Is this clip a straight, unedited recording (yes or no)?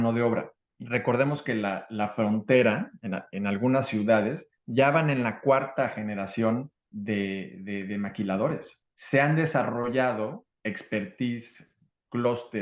no